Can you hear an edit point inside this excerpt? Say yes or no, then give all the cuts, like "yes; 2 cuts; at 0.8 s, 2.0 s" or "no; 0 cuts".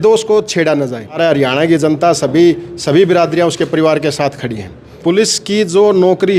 yes; 2 cuts; at 1.2 s, 4.9 s